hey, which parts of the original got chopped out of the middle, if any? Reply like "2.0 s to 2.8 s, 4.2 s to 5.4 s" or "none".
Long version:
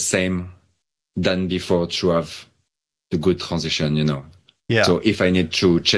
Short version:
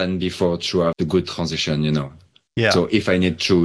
2.2 s to 3.1 s